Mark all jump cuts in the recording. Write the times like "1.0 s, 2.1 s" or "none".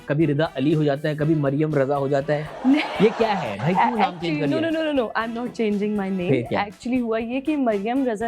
none